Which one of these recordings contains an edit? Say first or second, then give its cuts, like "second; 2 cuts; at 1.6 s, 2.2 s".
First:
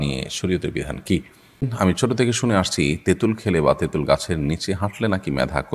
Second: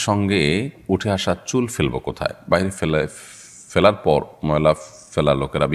first; 1 cut; at 1.7 s